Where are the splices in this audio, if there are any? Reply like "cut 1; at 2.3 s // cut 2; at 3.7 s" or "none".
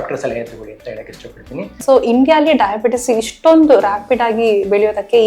cut 1; at 1.8 s